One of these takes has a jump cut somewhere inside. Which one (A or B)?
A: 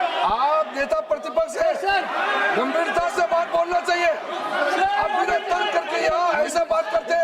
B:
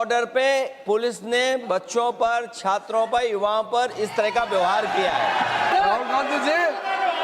B